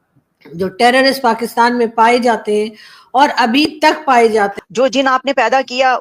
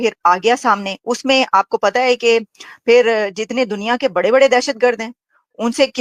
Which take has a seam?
first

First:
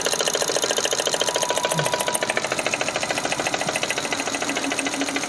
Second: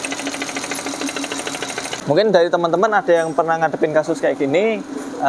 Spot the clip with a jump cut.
second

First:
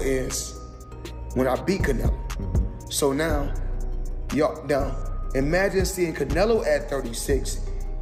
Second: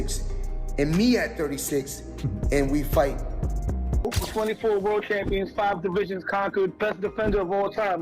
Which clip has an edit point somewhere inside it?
second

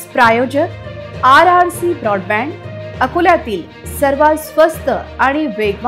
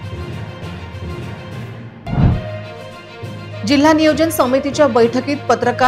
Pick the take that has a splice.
second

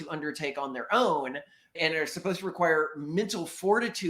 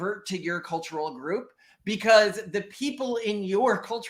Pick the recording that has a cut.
first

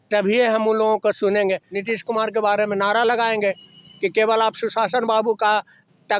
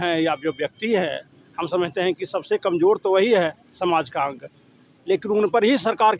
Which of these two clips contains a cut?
first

